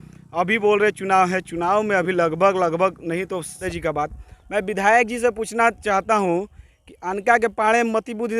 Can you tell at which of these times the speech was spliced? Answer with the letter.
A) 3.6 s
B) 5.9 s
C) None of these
A